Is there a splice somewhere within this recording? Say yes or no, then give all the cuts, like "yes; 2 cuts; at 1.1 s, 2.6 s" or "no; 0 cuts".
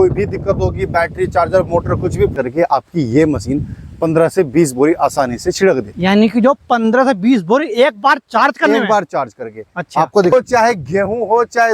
yes; 2 cuts; at 2.4 s, 10.3 s